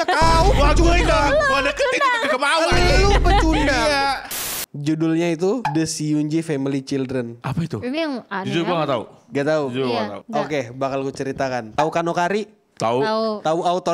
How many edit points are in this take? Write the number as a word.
four